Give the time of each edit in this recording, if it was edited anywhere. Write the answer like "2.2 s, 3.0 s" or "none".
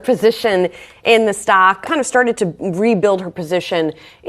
1.8 s